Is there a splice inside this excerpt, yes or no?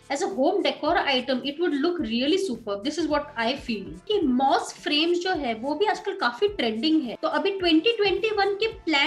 yes